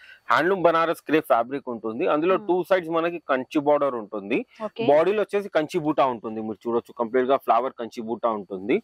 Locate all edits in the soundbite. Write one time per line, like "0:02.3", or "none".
none